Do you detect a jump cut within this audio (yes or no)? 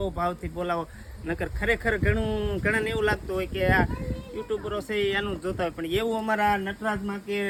no